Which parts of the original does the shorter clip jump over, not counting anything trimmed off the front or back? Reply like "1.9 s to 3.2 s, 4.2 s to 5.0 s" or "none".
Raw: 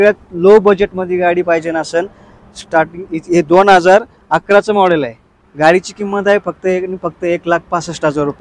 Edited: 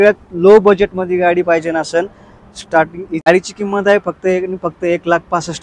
3.3 s to 5.7 s